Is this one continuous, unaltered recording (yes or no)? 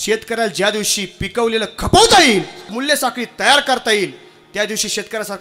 no